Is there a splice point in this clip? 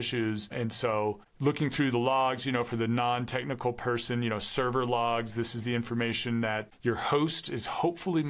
yes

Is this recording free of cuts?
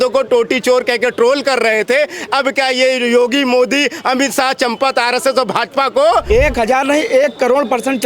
no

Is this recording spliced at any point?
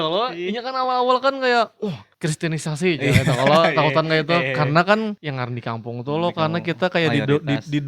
yes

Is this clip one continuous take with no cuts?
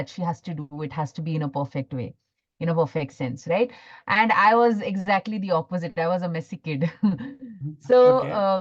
yes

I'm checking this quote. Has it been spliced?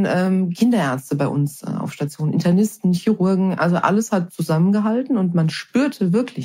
no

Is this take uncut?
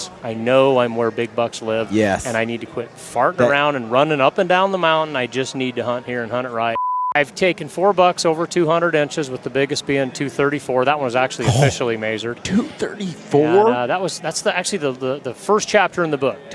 no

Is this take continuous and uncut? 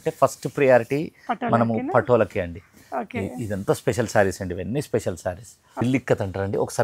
no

